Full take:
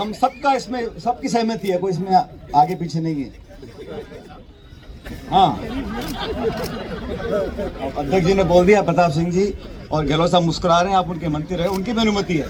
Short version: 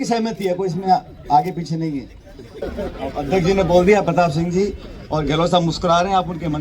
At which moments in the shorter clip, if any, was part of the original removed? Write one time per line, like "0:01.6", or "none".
0:02.6